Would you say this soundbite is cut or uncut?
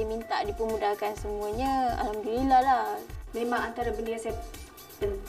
cut